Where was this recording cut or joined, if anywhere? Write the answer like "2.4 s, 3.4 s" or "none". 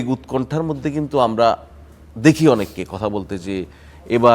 none